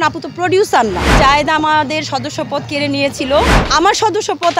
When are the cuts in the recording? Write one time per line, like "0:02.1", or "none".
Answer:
0:01.1
0:03.6